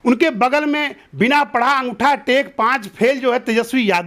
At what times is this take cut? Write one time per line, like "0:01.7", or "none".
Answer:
none